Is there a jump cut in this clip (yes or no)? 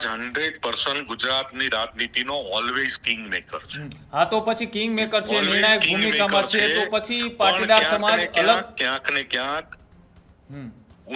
no